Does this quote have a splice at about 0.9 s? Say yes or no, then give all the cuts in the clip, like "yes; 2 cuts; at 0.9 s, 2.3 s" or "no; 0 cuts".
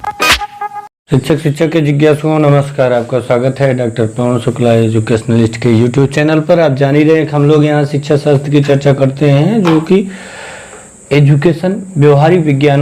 yes; 1 cut; at 0.9 s